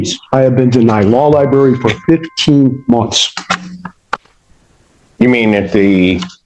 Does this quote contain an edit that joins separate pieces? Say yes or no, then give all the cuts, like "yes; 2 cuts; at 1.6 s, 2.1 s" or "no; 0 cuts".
no; 0 cuts